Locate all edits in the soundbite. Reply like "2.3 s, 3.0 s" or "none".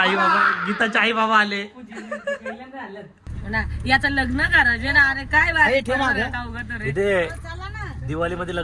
3.2 s